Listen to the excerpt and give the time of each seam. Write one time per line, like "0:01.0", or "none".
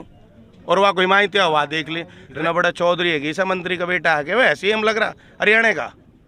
0:02.2